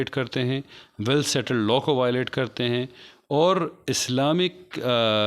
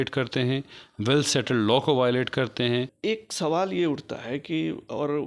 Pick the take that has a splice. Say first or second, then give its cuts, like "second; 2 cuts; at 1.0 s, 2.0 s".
second; 1 cut; at 2.9 s